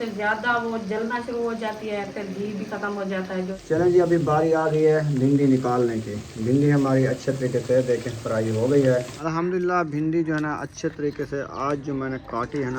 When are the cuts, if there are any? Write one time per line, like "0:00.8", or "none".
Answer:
0:03.5
0:09.1

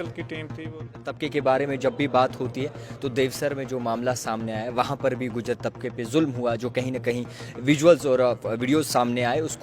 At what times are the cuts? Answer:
0:01.1

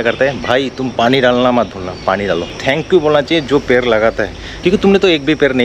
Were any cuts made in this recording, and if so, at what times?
0:02.6
0:04.5

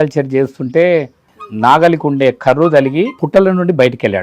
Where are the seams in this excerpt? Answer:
0:01.3
0:03.2

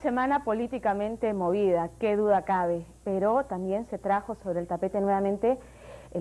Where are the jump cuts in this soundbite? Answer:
none

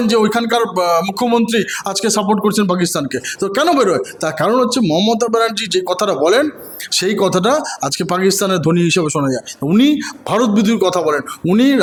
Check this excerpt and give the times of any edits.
none

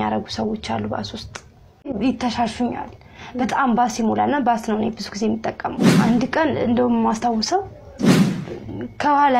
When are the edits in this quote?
0:01.9

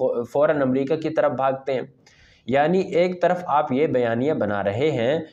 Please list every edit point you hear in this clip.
none

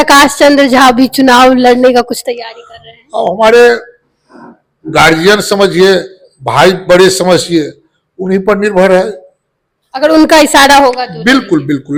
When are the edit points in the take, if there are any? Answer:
none

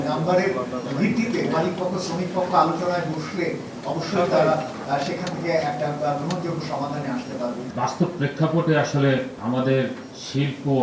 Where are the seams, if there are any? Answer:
0:07.7
0:09.3

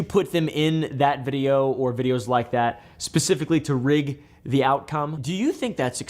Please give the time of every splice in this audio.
0:05.2

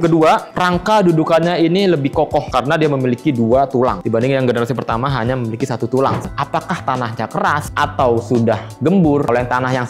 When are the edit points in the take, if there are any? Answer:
0:06.2

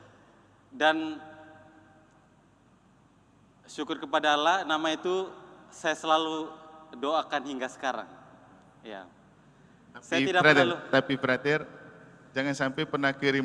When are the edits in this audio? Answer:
none

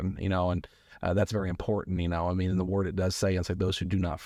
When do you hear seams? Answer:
none

